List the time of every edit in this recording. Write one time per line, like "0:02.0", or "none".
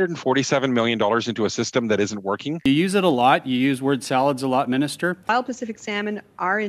0:02.7
0:05.3